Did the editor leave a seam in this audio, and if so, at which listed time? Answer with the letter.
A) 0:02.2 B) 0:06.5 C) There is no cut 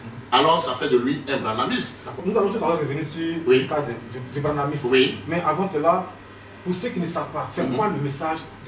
A